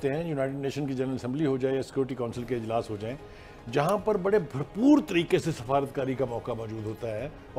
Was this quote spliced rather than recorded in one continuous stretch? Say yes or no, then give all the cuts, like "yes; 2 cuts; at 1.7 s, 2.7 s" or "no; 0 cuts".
no; 0 cuts